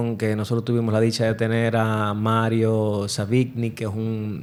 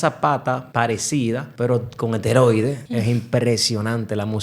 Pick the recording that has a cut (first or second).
second